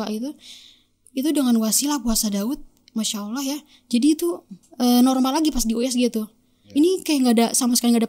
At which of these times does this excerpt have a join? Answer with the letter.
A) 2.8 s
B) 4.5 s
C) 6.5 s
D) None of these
D